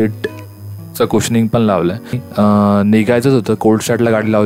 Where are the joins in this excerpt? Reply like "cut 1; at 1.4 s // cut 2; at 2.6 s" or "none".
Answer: cut 1; at 2.2 s